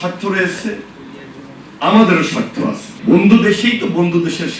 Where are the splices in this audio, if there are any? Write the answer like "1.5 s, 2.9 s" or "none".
2.9 s

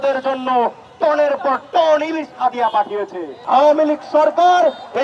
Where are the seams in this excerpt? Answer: 3.3 s

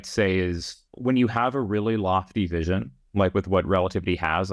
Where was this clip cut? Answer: 0.9 s, 3.0 s

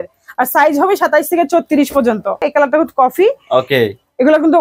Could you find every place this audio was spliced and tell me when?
2.5 s

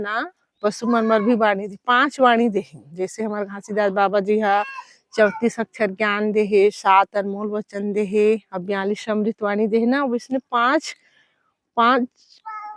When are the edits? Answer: none

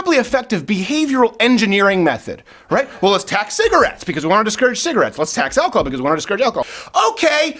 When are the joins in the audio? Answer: 6.6 s

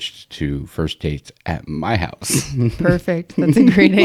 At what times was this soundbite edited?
none

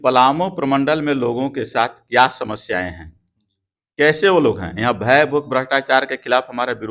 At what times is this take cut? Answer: none

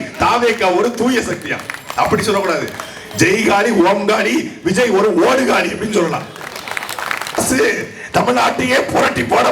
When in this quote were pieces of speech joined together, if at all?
7.4 s

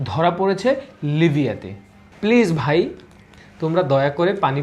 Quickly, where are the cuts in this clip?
2.0 s

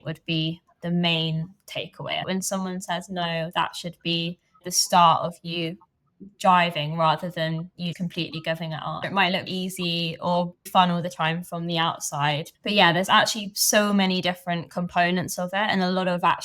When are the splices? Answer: 2.2 s, 9.0 s

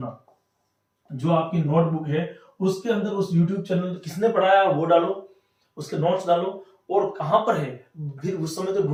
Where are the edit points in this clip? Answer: none

